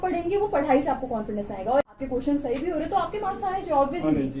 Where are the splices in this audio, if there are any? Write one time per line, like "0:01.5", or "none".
0:01.8